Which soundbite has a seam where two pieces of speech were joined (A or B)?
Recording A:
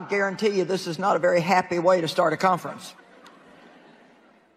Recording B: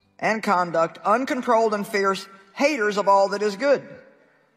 A